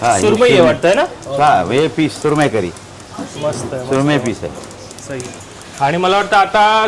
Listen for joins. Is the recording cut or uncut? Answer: uncut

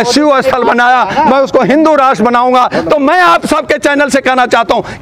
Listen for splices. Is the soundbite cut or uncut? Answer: uncut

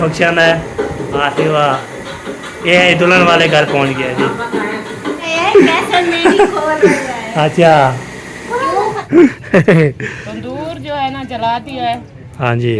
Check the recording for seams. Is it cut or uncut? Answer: cut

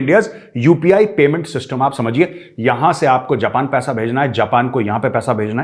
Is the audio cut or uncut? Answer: uncut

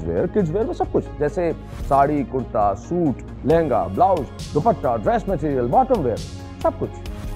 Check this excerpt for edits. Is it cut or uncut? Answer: uncut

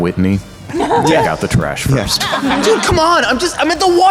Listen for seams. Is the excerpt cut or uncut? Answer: uncut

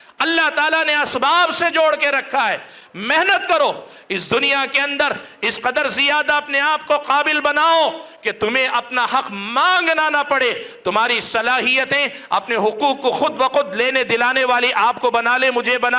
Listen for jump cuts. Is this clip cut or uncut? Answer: uncut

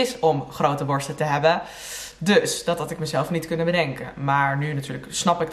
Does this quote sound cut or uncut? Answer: uncut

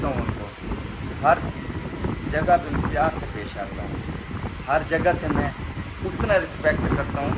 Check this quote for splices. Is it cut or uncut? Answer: uncut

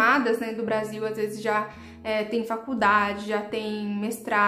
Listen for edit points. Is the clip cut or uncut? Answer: uncut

